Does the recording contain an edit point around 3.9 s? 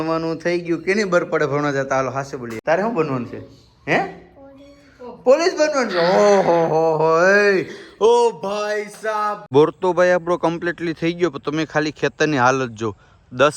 no; 2 cuts; at 2.5 s, 9.4 s

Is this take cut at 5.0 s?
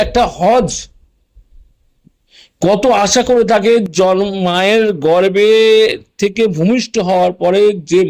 no; 0 cuts

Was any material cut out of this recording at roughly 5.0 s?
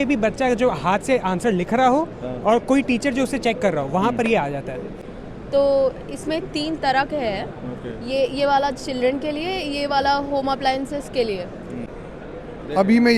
yes; 2 cuts; at 5.0 s, 11.9 s

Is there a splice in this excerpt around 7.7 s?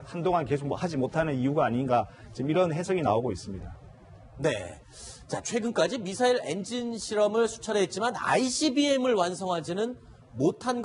yes; 1 cut; at 7.7 s

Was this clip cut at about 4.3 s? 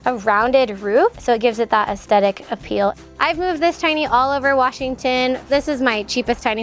no; 3 cuts; at 1.1 s, 3.1 s, 5.5 s

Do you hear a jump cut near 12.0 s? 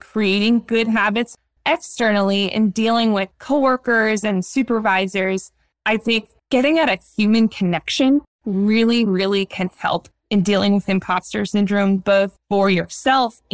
no; 1 cut; at 1.3 s

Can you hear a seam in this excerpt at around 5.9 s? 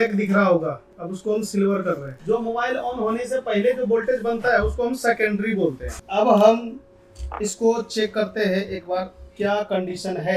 yes; 2 cuts; at 2.2 s, 5.9 s

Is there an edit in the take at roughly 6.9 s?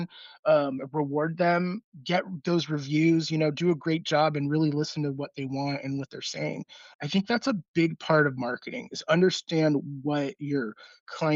yes; 2 cuts; at 1.8 s, 6.9 s

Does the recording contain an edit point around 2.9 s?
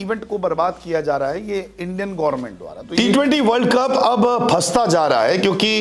yes; 1 cut; at 2.9 s

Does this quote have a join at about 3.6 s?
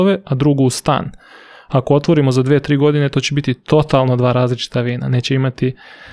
no; 0 cuts

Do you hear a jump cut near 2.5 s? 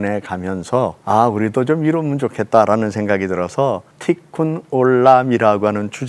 no; 2 cuts; at 1.0 s, 3.9 s

